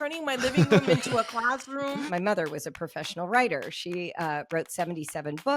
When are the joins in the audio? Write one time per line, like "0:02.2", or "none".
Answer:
0:02.1